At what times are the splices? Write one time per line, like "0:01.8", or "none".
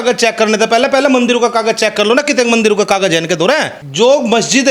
0:03.8

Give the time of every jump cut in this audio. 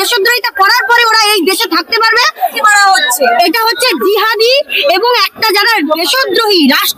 0:02.5

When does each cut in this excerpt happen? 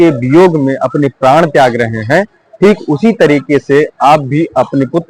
none

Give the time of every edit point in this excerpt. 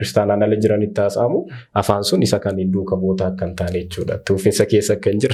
none

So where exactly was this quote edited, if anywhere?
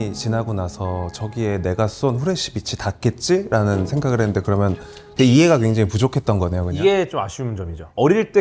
none

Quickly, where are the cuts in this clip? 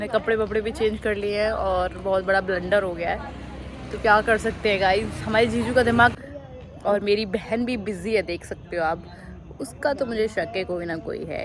0:06.2

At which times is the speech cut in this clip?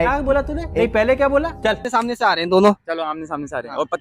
0:01.8

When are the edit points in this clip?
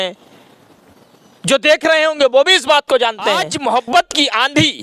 0:03.5

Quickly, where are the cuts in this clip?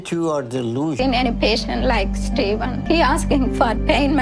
0:01.0

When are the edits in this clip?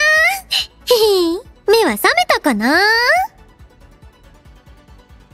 0:03.3

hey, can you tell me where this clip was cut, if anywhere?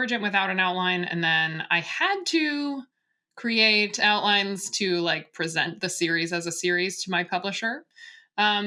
none

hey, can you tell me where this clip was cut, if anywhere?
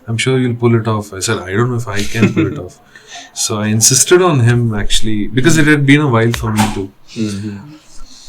none

